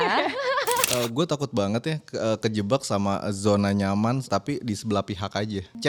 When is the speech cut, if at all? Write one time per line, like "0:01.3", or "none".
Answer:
0:00.9
0:04.3